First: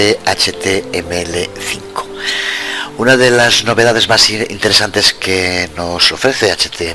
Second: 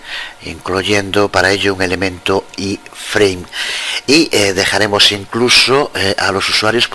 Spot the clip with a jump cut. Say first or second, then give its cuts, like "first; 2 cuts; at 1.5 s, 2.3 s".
second; 1 cut; at 5.2 s